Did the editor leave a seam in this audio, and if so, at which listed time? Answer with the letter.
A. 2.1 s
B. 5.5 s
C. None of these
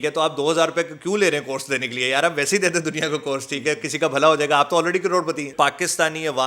B